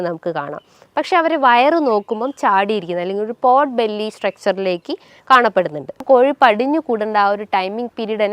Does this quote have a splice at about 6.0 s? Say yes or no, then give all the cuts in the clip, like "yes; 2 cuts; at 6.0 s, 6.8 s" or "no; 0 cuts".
yes; 1 cut; at 6.0 s